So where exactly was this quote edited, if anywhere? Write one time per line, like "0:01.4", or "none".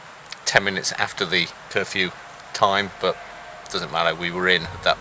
0:01.6